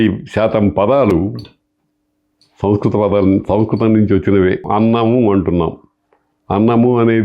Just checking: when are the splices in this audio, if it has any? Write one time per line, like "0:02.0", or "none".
0:04.7